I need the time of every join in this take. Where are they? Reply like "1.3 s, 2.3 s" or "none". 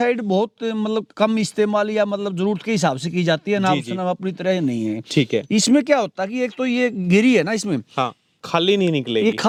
none